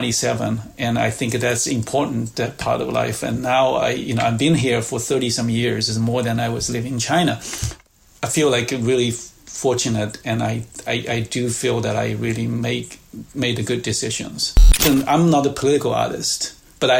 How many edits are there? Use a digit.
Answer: 1